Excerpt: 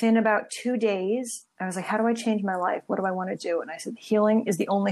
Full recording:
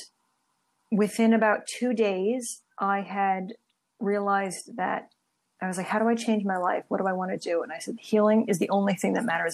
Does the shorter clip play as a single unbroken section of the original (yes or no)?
no